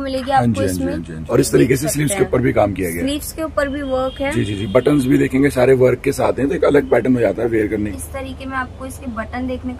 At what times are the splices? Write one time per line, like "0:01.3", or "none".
0:01.1
0:07.9